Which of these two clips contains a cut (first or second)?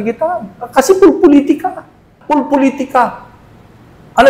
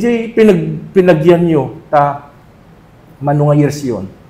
first